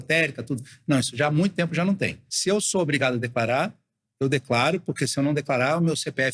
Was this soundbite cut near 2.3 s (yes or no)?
yes